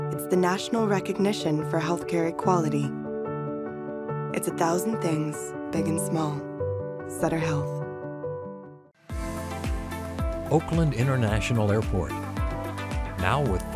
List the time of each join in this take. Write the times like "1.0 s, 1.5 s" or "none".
8.8 s